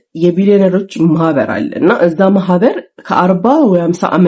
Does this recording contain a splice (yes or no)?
no